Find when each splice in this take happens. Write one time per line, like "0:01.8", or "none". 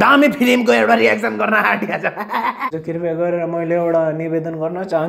0:02.7

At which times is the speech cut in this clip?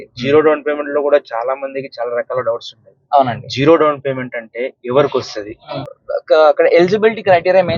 0:05.8

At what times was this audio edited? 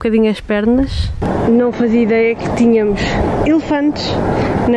0:01.3

